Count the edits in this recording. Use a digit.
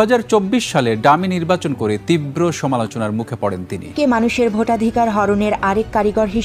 1